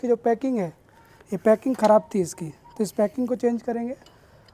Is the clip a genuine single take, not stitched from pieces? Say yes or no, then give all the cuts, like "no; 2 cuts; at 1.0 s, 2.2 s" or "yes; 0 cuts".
yes; 0 cuts